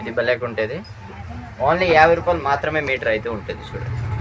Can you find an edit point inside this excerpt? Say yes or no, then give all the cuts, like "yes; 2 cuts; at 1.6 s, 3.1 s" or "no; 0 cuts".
no; 0 cuts